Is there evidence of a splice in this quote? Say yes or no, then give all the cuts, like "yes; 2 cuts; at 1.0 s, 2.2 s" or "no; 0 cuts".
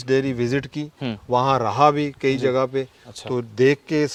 no; 0 cuts